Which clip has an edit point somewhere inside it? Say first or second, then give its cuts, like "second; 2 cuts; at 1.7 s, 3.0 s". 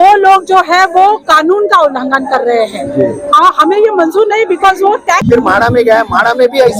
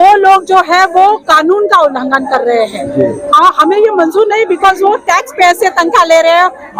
first; 1 cut; at 5.3 s